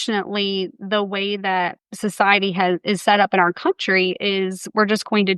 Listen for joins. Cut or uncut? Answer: cut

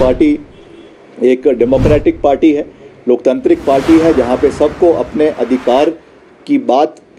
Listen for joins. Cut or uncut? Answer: uncut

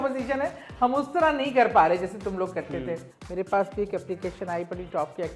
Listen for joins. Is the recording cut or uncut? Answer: cut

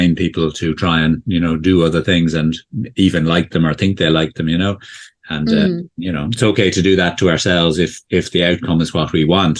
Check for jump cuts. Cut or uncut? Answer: uncut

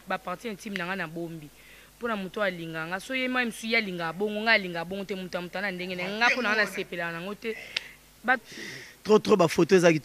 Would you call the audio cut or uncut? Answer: cut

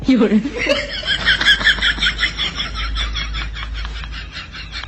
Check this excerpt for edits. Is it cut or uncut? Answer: uncut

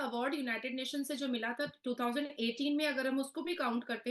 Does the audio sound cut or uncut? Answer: uncut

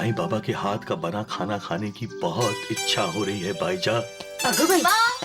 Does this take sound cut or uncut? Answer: cut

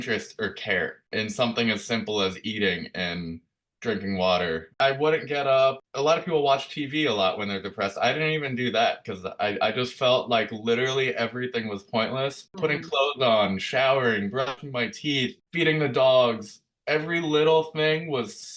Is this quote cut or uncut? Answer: cut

